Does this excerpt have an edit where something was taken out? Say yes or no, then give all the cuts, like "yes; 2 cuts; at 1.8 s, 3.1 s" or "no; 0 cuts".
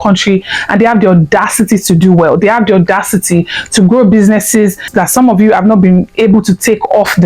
yes; 1 cut; at 4.9 s